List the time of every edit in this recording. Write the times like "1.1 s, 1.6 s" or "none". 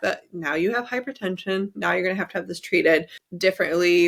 none